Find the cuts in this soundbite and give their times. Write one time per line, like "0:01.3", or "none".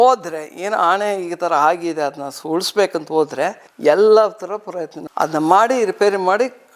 0:03.7